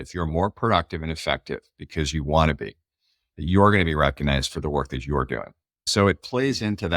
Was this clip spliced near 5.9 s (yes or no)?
yes